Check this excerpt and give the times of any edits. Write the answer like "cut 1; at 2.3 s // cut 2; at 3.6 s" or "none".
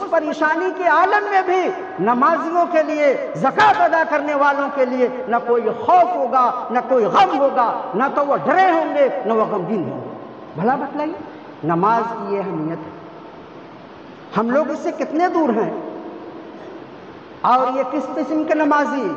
none